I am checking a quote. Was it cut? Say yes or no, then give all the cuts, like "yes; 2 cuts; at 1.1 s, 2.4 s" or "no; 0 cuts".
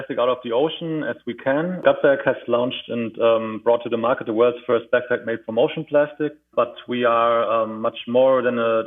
yes; 2 cuts; at 1.8 s, 6.4 s